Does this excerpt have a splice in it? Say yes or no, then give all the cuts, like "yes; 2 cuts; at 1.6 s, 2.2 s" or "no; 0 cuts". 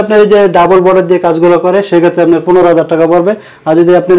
no; 0 cuts